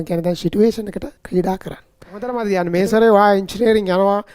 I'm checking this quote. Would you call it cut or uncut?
cut